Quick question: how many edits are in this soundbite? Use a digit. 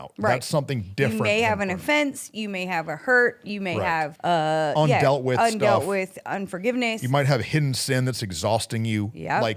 1